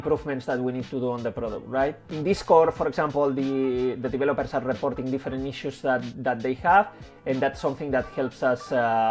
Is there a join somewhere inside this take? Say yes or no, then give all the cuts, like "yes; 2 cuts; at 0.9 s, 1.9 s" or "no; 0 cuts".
no; 0 cuts